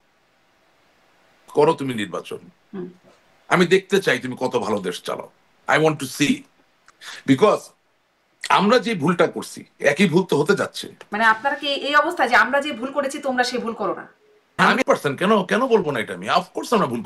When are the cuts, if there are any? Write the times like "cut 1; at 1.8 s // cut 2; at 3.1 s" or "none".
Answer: cut 1; at 11.1 s // cut 2; at 14.7 s

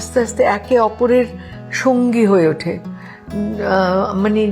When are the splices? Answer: none

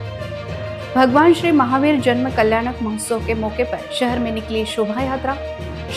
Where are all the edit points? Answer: cut 1; at 0.9 s

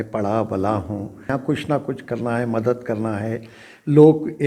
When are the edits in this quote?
cut 1; at 1.3 s

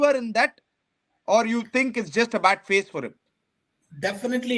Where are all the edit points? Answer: none

